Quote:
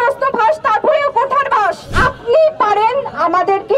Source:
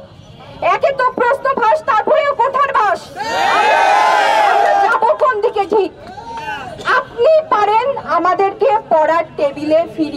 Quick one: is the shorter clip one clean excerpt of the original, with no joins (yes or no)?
no